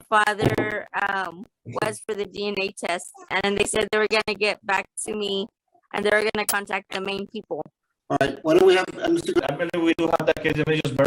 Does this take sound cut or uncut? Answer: cut